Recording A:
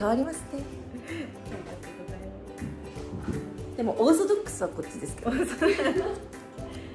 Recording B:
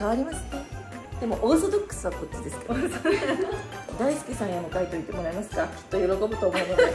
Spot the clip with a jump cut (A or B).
B